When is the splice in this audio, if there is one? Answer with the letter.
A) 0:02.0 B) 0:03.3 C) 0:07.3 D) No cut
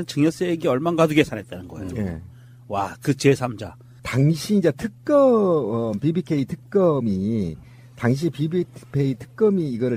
D